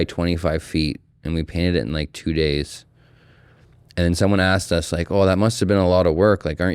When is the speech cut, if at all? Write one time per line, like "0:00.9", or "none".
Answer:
none